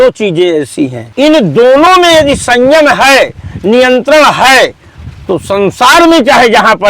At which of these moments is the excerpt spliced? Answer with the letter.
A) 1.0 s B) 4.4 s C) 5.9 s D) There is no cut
A